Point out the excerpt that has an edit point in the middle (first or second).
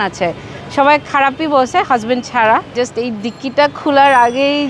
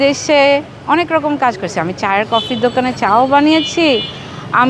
first